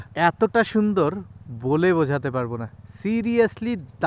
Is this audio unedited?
yes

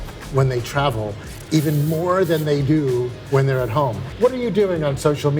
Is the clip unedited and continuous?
no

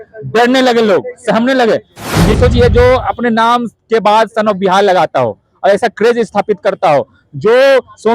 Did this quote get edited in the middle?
yes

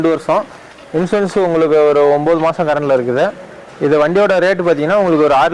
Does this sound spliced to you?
no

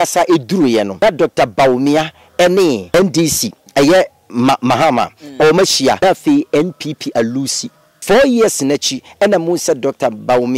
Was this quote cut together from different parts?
yes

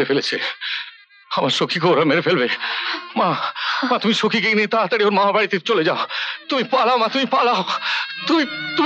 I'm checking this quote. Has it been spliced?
no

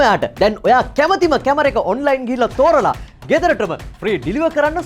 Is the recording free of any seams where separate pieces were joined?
yes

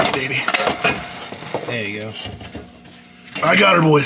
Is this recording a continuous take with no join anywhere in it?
yes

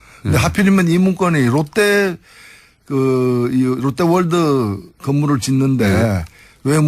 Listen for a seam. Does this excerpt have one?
no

